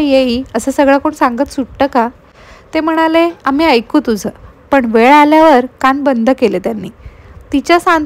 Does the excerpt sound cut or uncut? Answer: uncut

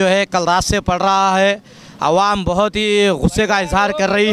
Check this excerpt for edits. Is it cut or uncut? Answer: uncut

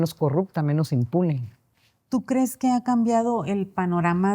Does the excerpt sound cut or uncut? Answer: uncut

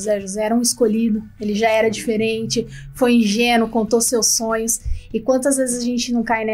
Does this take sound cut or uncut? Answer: uncut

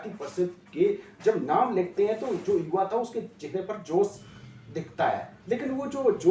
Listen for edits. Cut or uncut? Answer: uncut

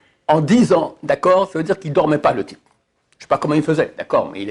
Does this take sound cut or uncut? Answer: uncut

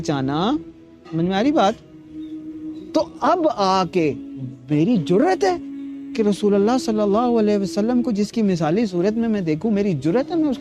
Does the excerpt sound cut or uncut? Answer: uncut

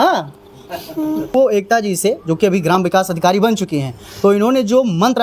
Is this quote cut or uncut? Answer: cut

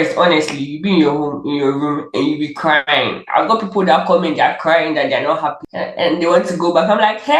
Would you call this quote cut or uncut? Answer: uncut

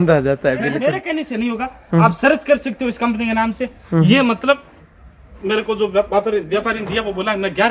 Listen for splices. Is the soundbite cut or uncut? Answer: cut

